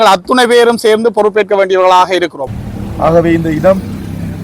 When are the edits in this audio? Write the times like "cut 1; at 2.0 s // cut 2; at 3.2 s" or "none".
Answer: cut 1; at 2.4 s